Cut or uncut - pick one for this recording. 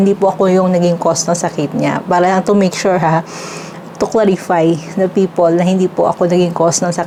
uncut